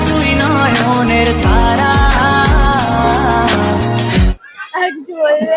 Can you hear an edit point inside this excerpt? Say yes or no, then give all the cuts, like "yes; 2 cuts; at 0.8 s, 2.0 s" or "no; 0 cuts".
yes; 1 cut; at 4.3 s